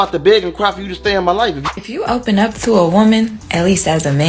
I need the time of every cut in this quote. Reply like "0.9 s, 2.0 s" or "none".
1.6 s